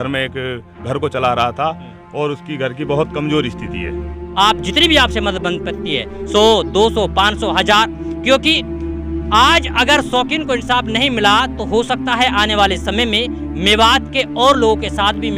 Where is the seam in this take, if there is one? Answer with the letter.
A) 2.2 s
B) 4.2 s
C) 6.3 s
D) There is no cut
B